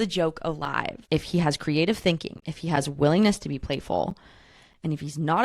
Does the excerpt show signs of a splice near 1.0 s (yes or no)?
yes